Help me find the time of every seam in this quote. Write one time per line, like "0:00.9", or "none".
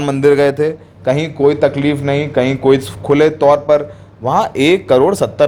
none